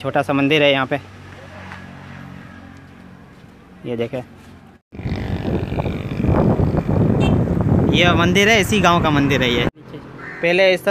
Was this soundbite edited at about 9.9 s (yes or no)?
yes